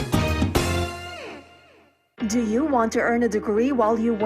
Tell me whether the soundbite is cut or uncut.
cut